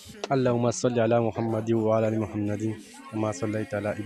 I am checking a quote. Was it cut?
no; 0 cuts

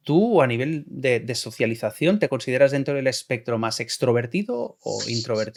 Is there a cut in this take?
no; 0 cuts

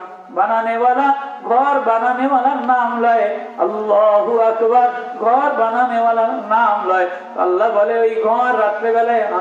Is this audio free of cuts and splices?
yes; 0 cuts

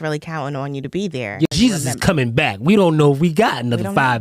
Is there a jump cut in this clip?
yes; 1 cut; at 1.5 s

